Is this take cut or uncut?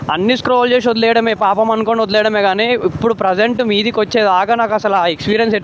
uncut